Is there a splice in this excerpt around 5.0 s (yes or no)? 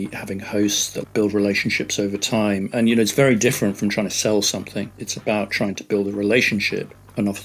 no